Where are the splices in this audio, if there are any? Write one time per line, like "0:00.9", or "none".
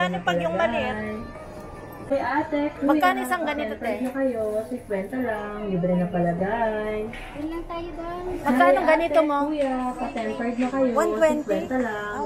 0:02.1